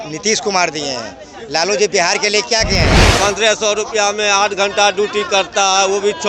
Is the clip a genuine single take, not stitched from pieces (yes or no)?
no